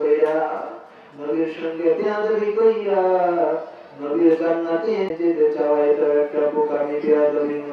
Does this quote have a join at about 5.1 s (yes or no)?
yes